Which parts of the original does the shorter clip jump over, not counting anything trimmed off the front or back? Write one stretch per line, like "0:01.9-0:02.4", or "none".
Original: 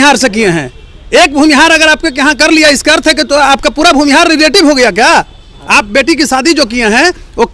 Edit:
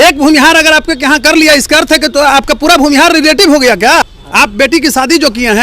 0:05.3-0:05.5